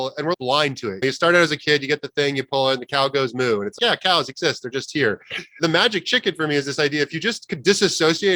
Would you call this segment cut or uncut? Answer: uncut